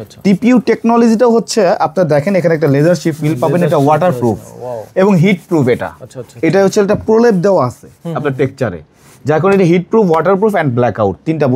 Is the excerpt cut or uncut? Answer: uncut